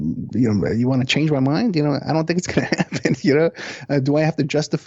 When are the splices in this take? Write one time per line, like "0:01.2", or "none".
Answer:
none